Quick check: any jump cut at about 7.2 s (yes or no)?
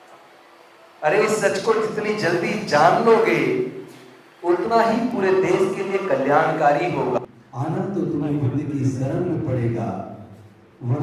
yes